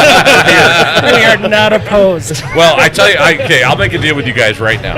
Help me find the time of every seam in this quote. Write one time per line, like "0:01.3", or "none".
none